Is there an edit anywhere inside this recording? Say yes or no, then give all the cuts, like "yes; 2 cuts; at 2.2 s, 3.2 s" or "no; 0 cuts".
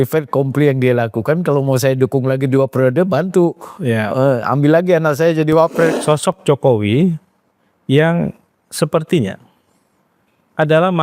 yes; 1 cut; at 5.9 s